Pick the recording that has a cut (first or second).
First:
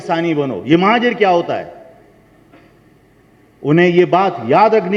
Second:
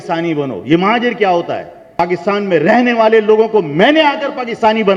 second